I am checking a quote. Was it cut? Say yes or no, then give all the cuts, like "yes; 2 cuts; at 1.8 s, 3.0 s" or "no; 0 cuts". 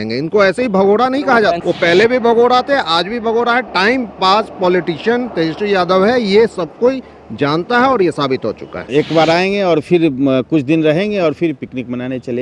yes; 2 cuts; at 1.6 s, 8.8 s